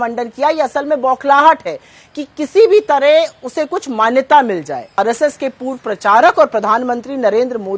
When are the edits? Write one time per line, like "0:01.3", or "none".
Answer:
0:05.0